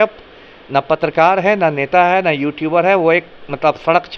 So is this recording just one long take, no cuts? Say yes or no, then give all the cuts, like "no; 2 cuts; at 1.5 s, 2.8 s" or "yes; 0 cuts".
yes; 0 cuts